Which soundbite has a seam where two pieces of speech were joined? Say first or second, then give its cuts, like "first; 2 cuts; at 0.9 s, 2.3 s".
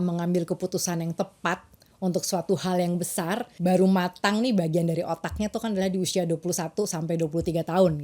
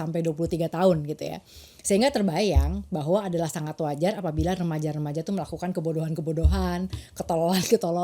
first; 1 cut; at 3.6 s